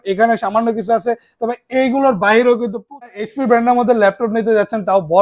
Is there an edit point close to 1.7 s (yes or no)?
no